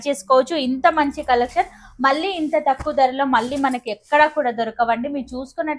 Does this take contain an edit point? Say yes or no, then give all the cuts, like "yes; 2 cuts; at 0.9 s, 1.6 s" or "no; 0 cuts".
no; 0 cuts